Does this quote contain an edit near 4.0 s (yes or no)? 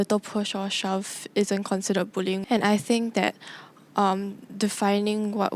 no